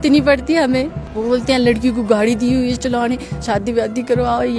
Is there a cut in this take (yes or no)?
yes